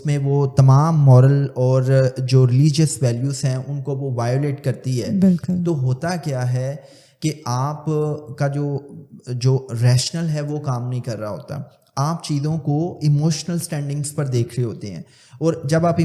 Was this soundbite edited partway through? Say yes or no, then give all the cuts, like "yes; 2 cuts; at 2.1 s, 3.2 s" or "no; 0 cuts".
no; 0 cuts